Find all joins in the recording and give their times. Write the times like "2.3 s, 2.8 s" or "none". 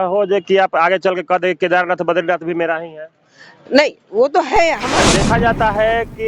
5.0 s